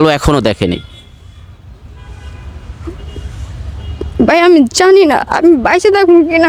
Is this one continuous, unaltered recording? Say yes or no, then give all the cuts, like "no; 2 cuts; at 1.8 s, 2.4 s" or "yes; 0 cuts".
yes; 0 cuts